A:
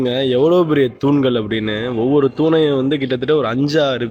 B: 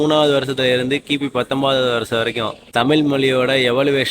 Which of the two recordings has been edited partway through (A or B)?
B